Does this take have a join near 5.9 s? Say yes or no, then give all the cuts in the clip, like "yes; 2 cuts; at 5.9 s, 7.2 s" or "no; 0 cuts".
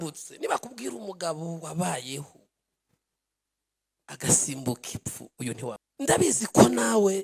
yes; 1 cut; at 5.9 s